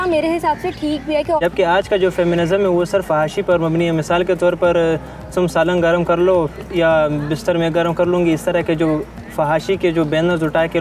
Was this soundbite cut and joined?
yes; 1 cut; at 1.4 s

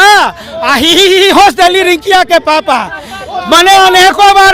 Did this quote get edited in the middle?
no; 0 cuts

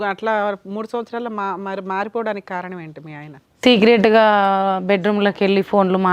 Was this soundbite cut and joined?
no; 0 cuts

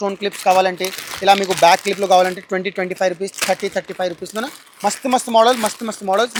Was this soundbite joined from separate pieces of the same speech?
no; 0 cuts

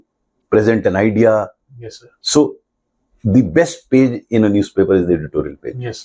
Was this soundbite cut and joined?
no; 0 cuts

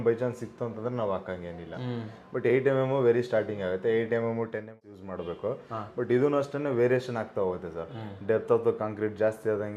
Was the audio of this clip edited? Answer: yes; 1 cut; at 4.8 s

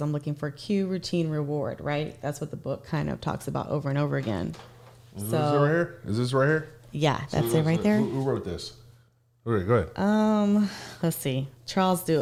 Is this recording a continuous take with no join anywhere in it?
yes; 0 cuts

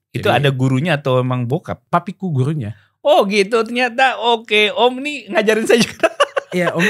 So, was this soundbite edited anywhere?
yes; 1 cut; at 1.8 s

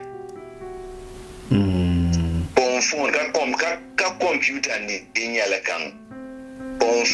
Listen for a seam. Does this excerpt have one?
no; 0 cuts

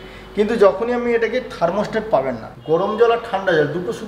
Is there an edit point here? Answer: yes; 1 cut; at 2.5 s

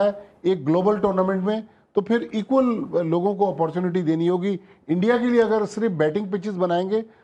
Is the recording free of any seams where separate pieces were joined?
yes; 0 cuts

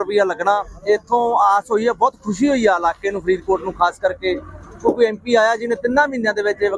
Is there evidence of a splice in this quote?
no; 0 cuts

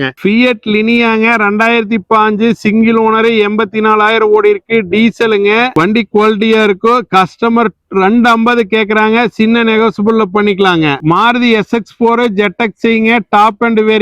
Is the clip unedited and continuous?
no; 1 cut; at 11.0 s

